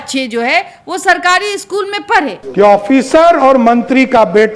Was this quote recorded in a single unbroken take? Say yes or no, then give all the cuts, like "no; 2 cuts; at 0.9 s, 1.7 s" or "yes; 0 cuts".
no; 1 cut; at 2.4 s